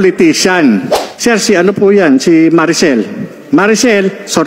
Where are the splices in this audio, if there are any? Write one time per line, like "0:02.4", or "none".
0:01.0